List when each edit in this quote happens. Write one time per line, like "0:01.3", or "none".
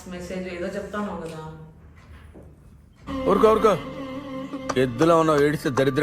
0:03.0